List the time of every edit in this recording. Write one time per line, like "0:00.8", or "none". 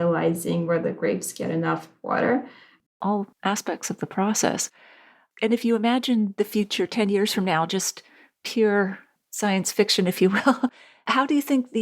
0:02.8